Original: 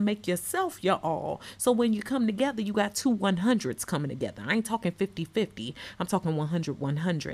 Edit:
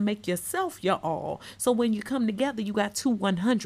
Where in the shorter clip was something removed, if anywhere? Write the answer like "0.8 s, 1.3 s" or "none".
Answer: none